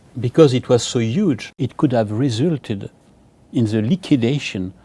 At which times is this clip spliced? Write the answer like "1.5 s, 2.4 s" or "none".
1.5 s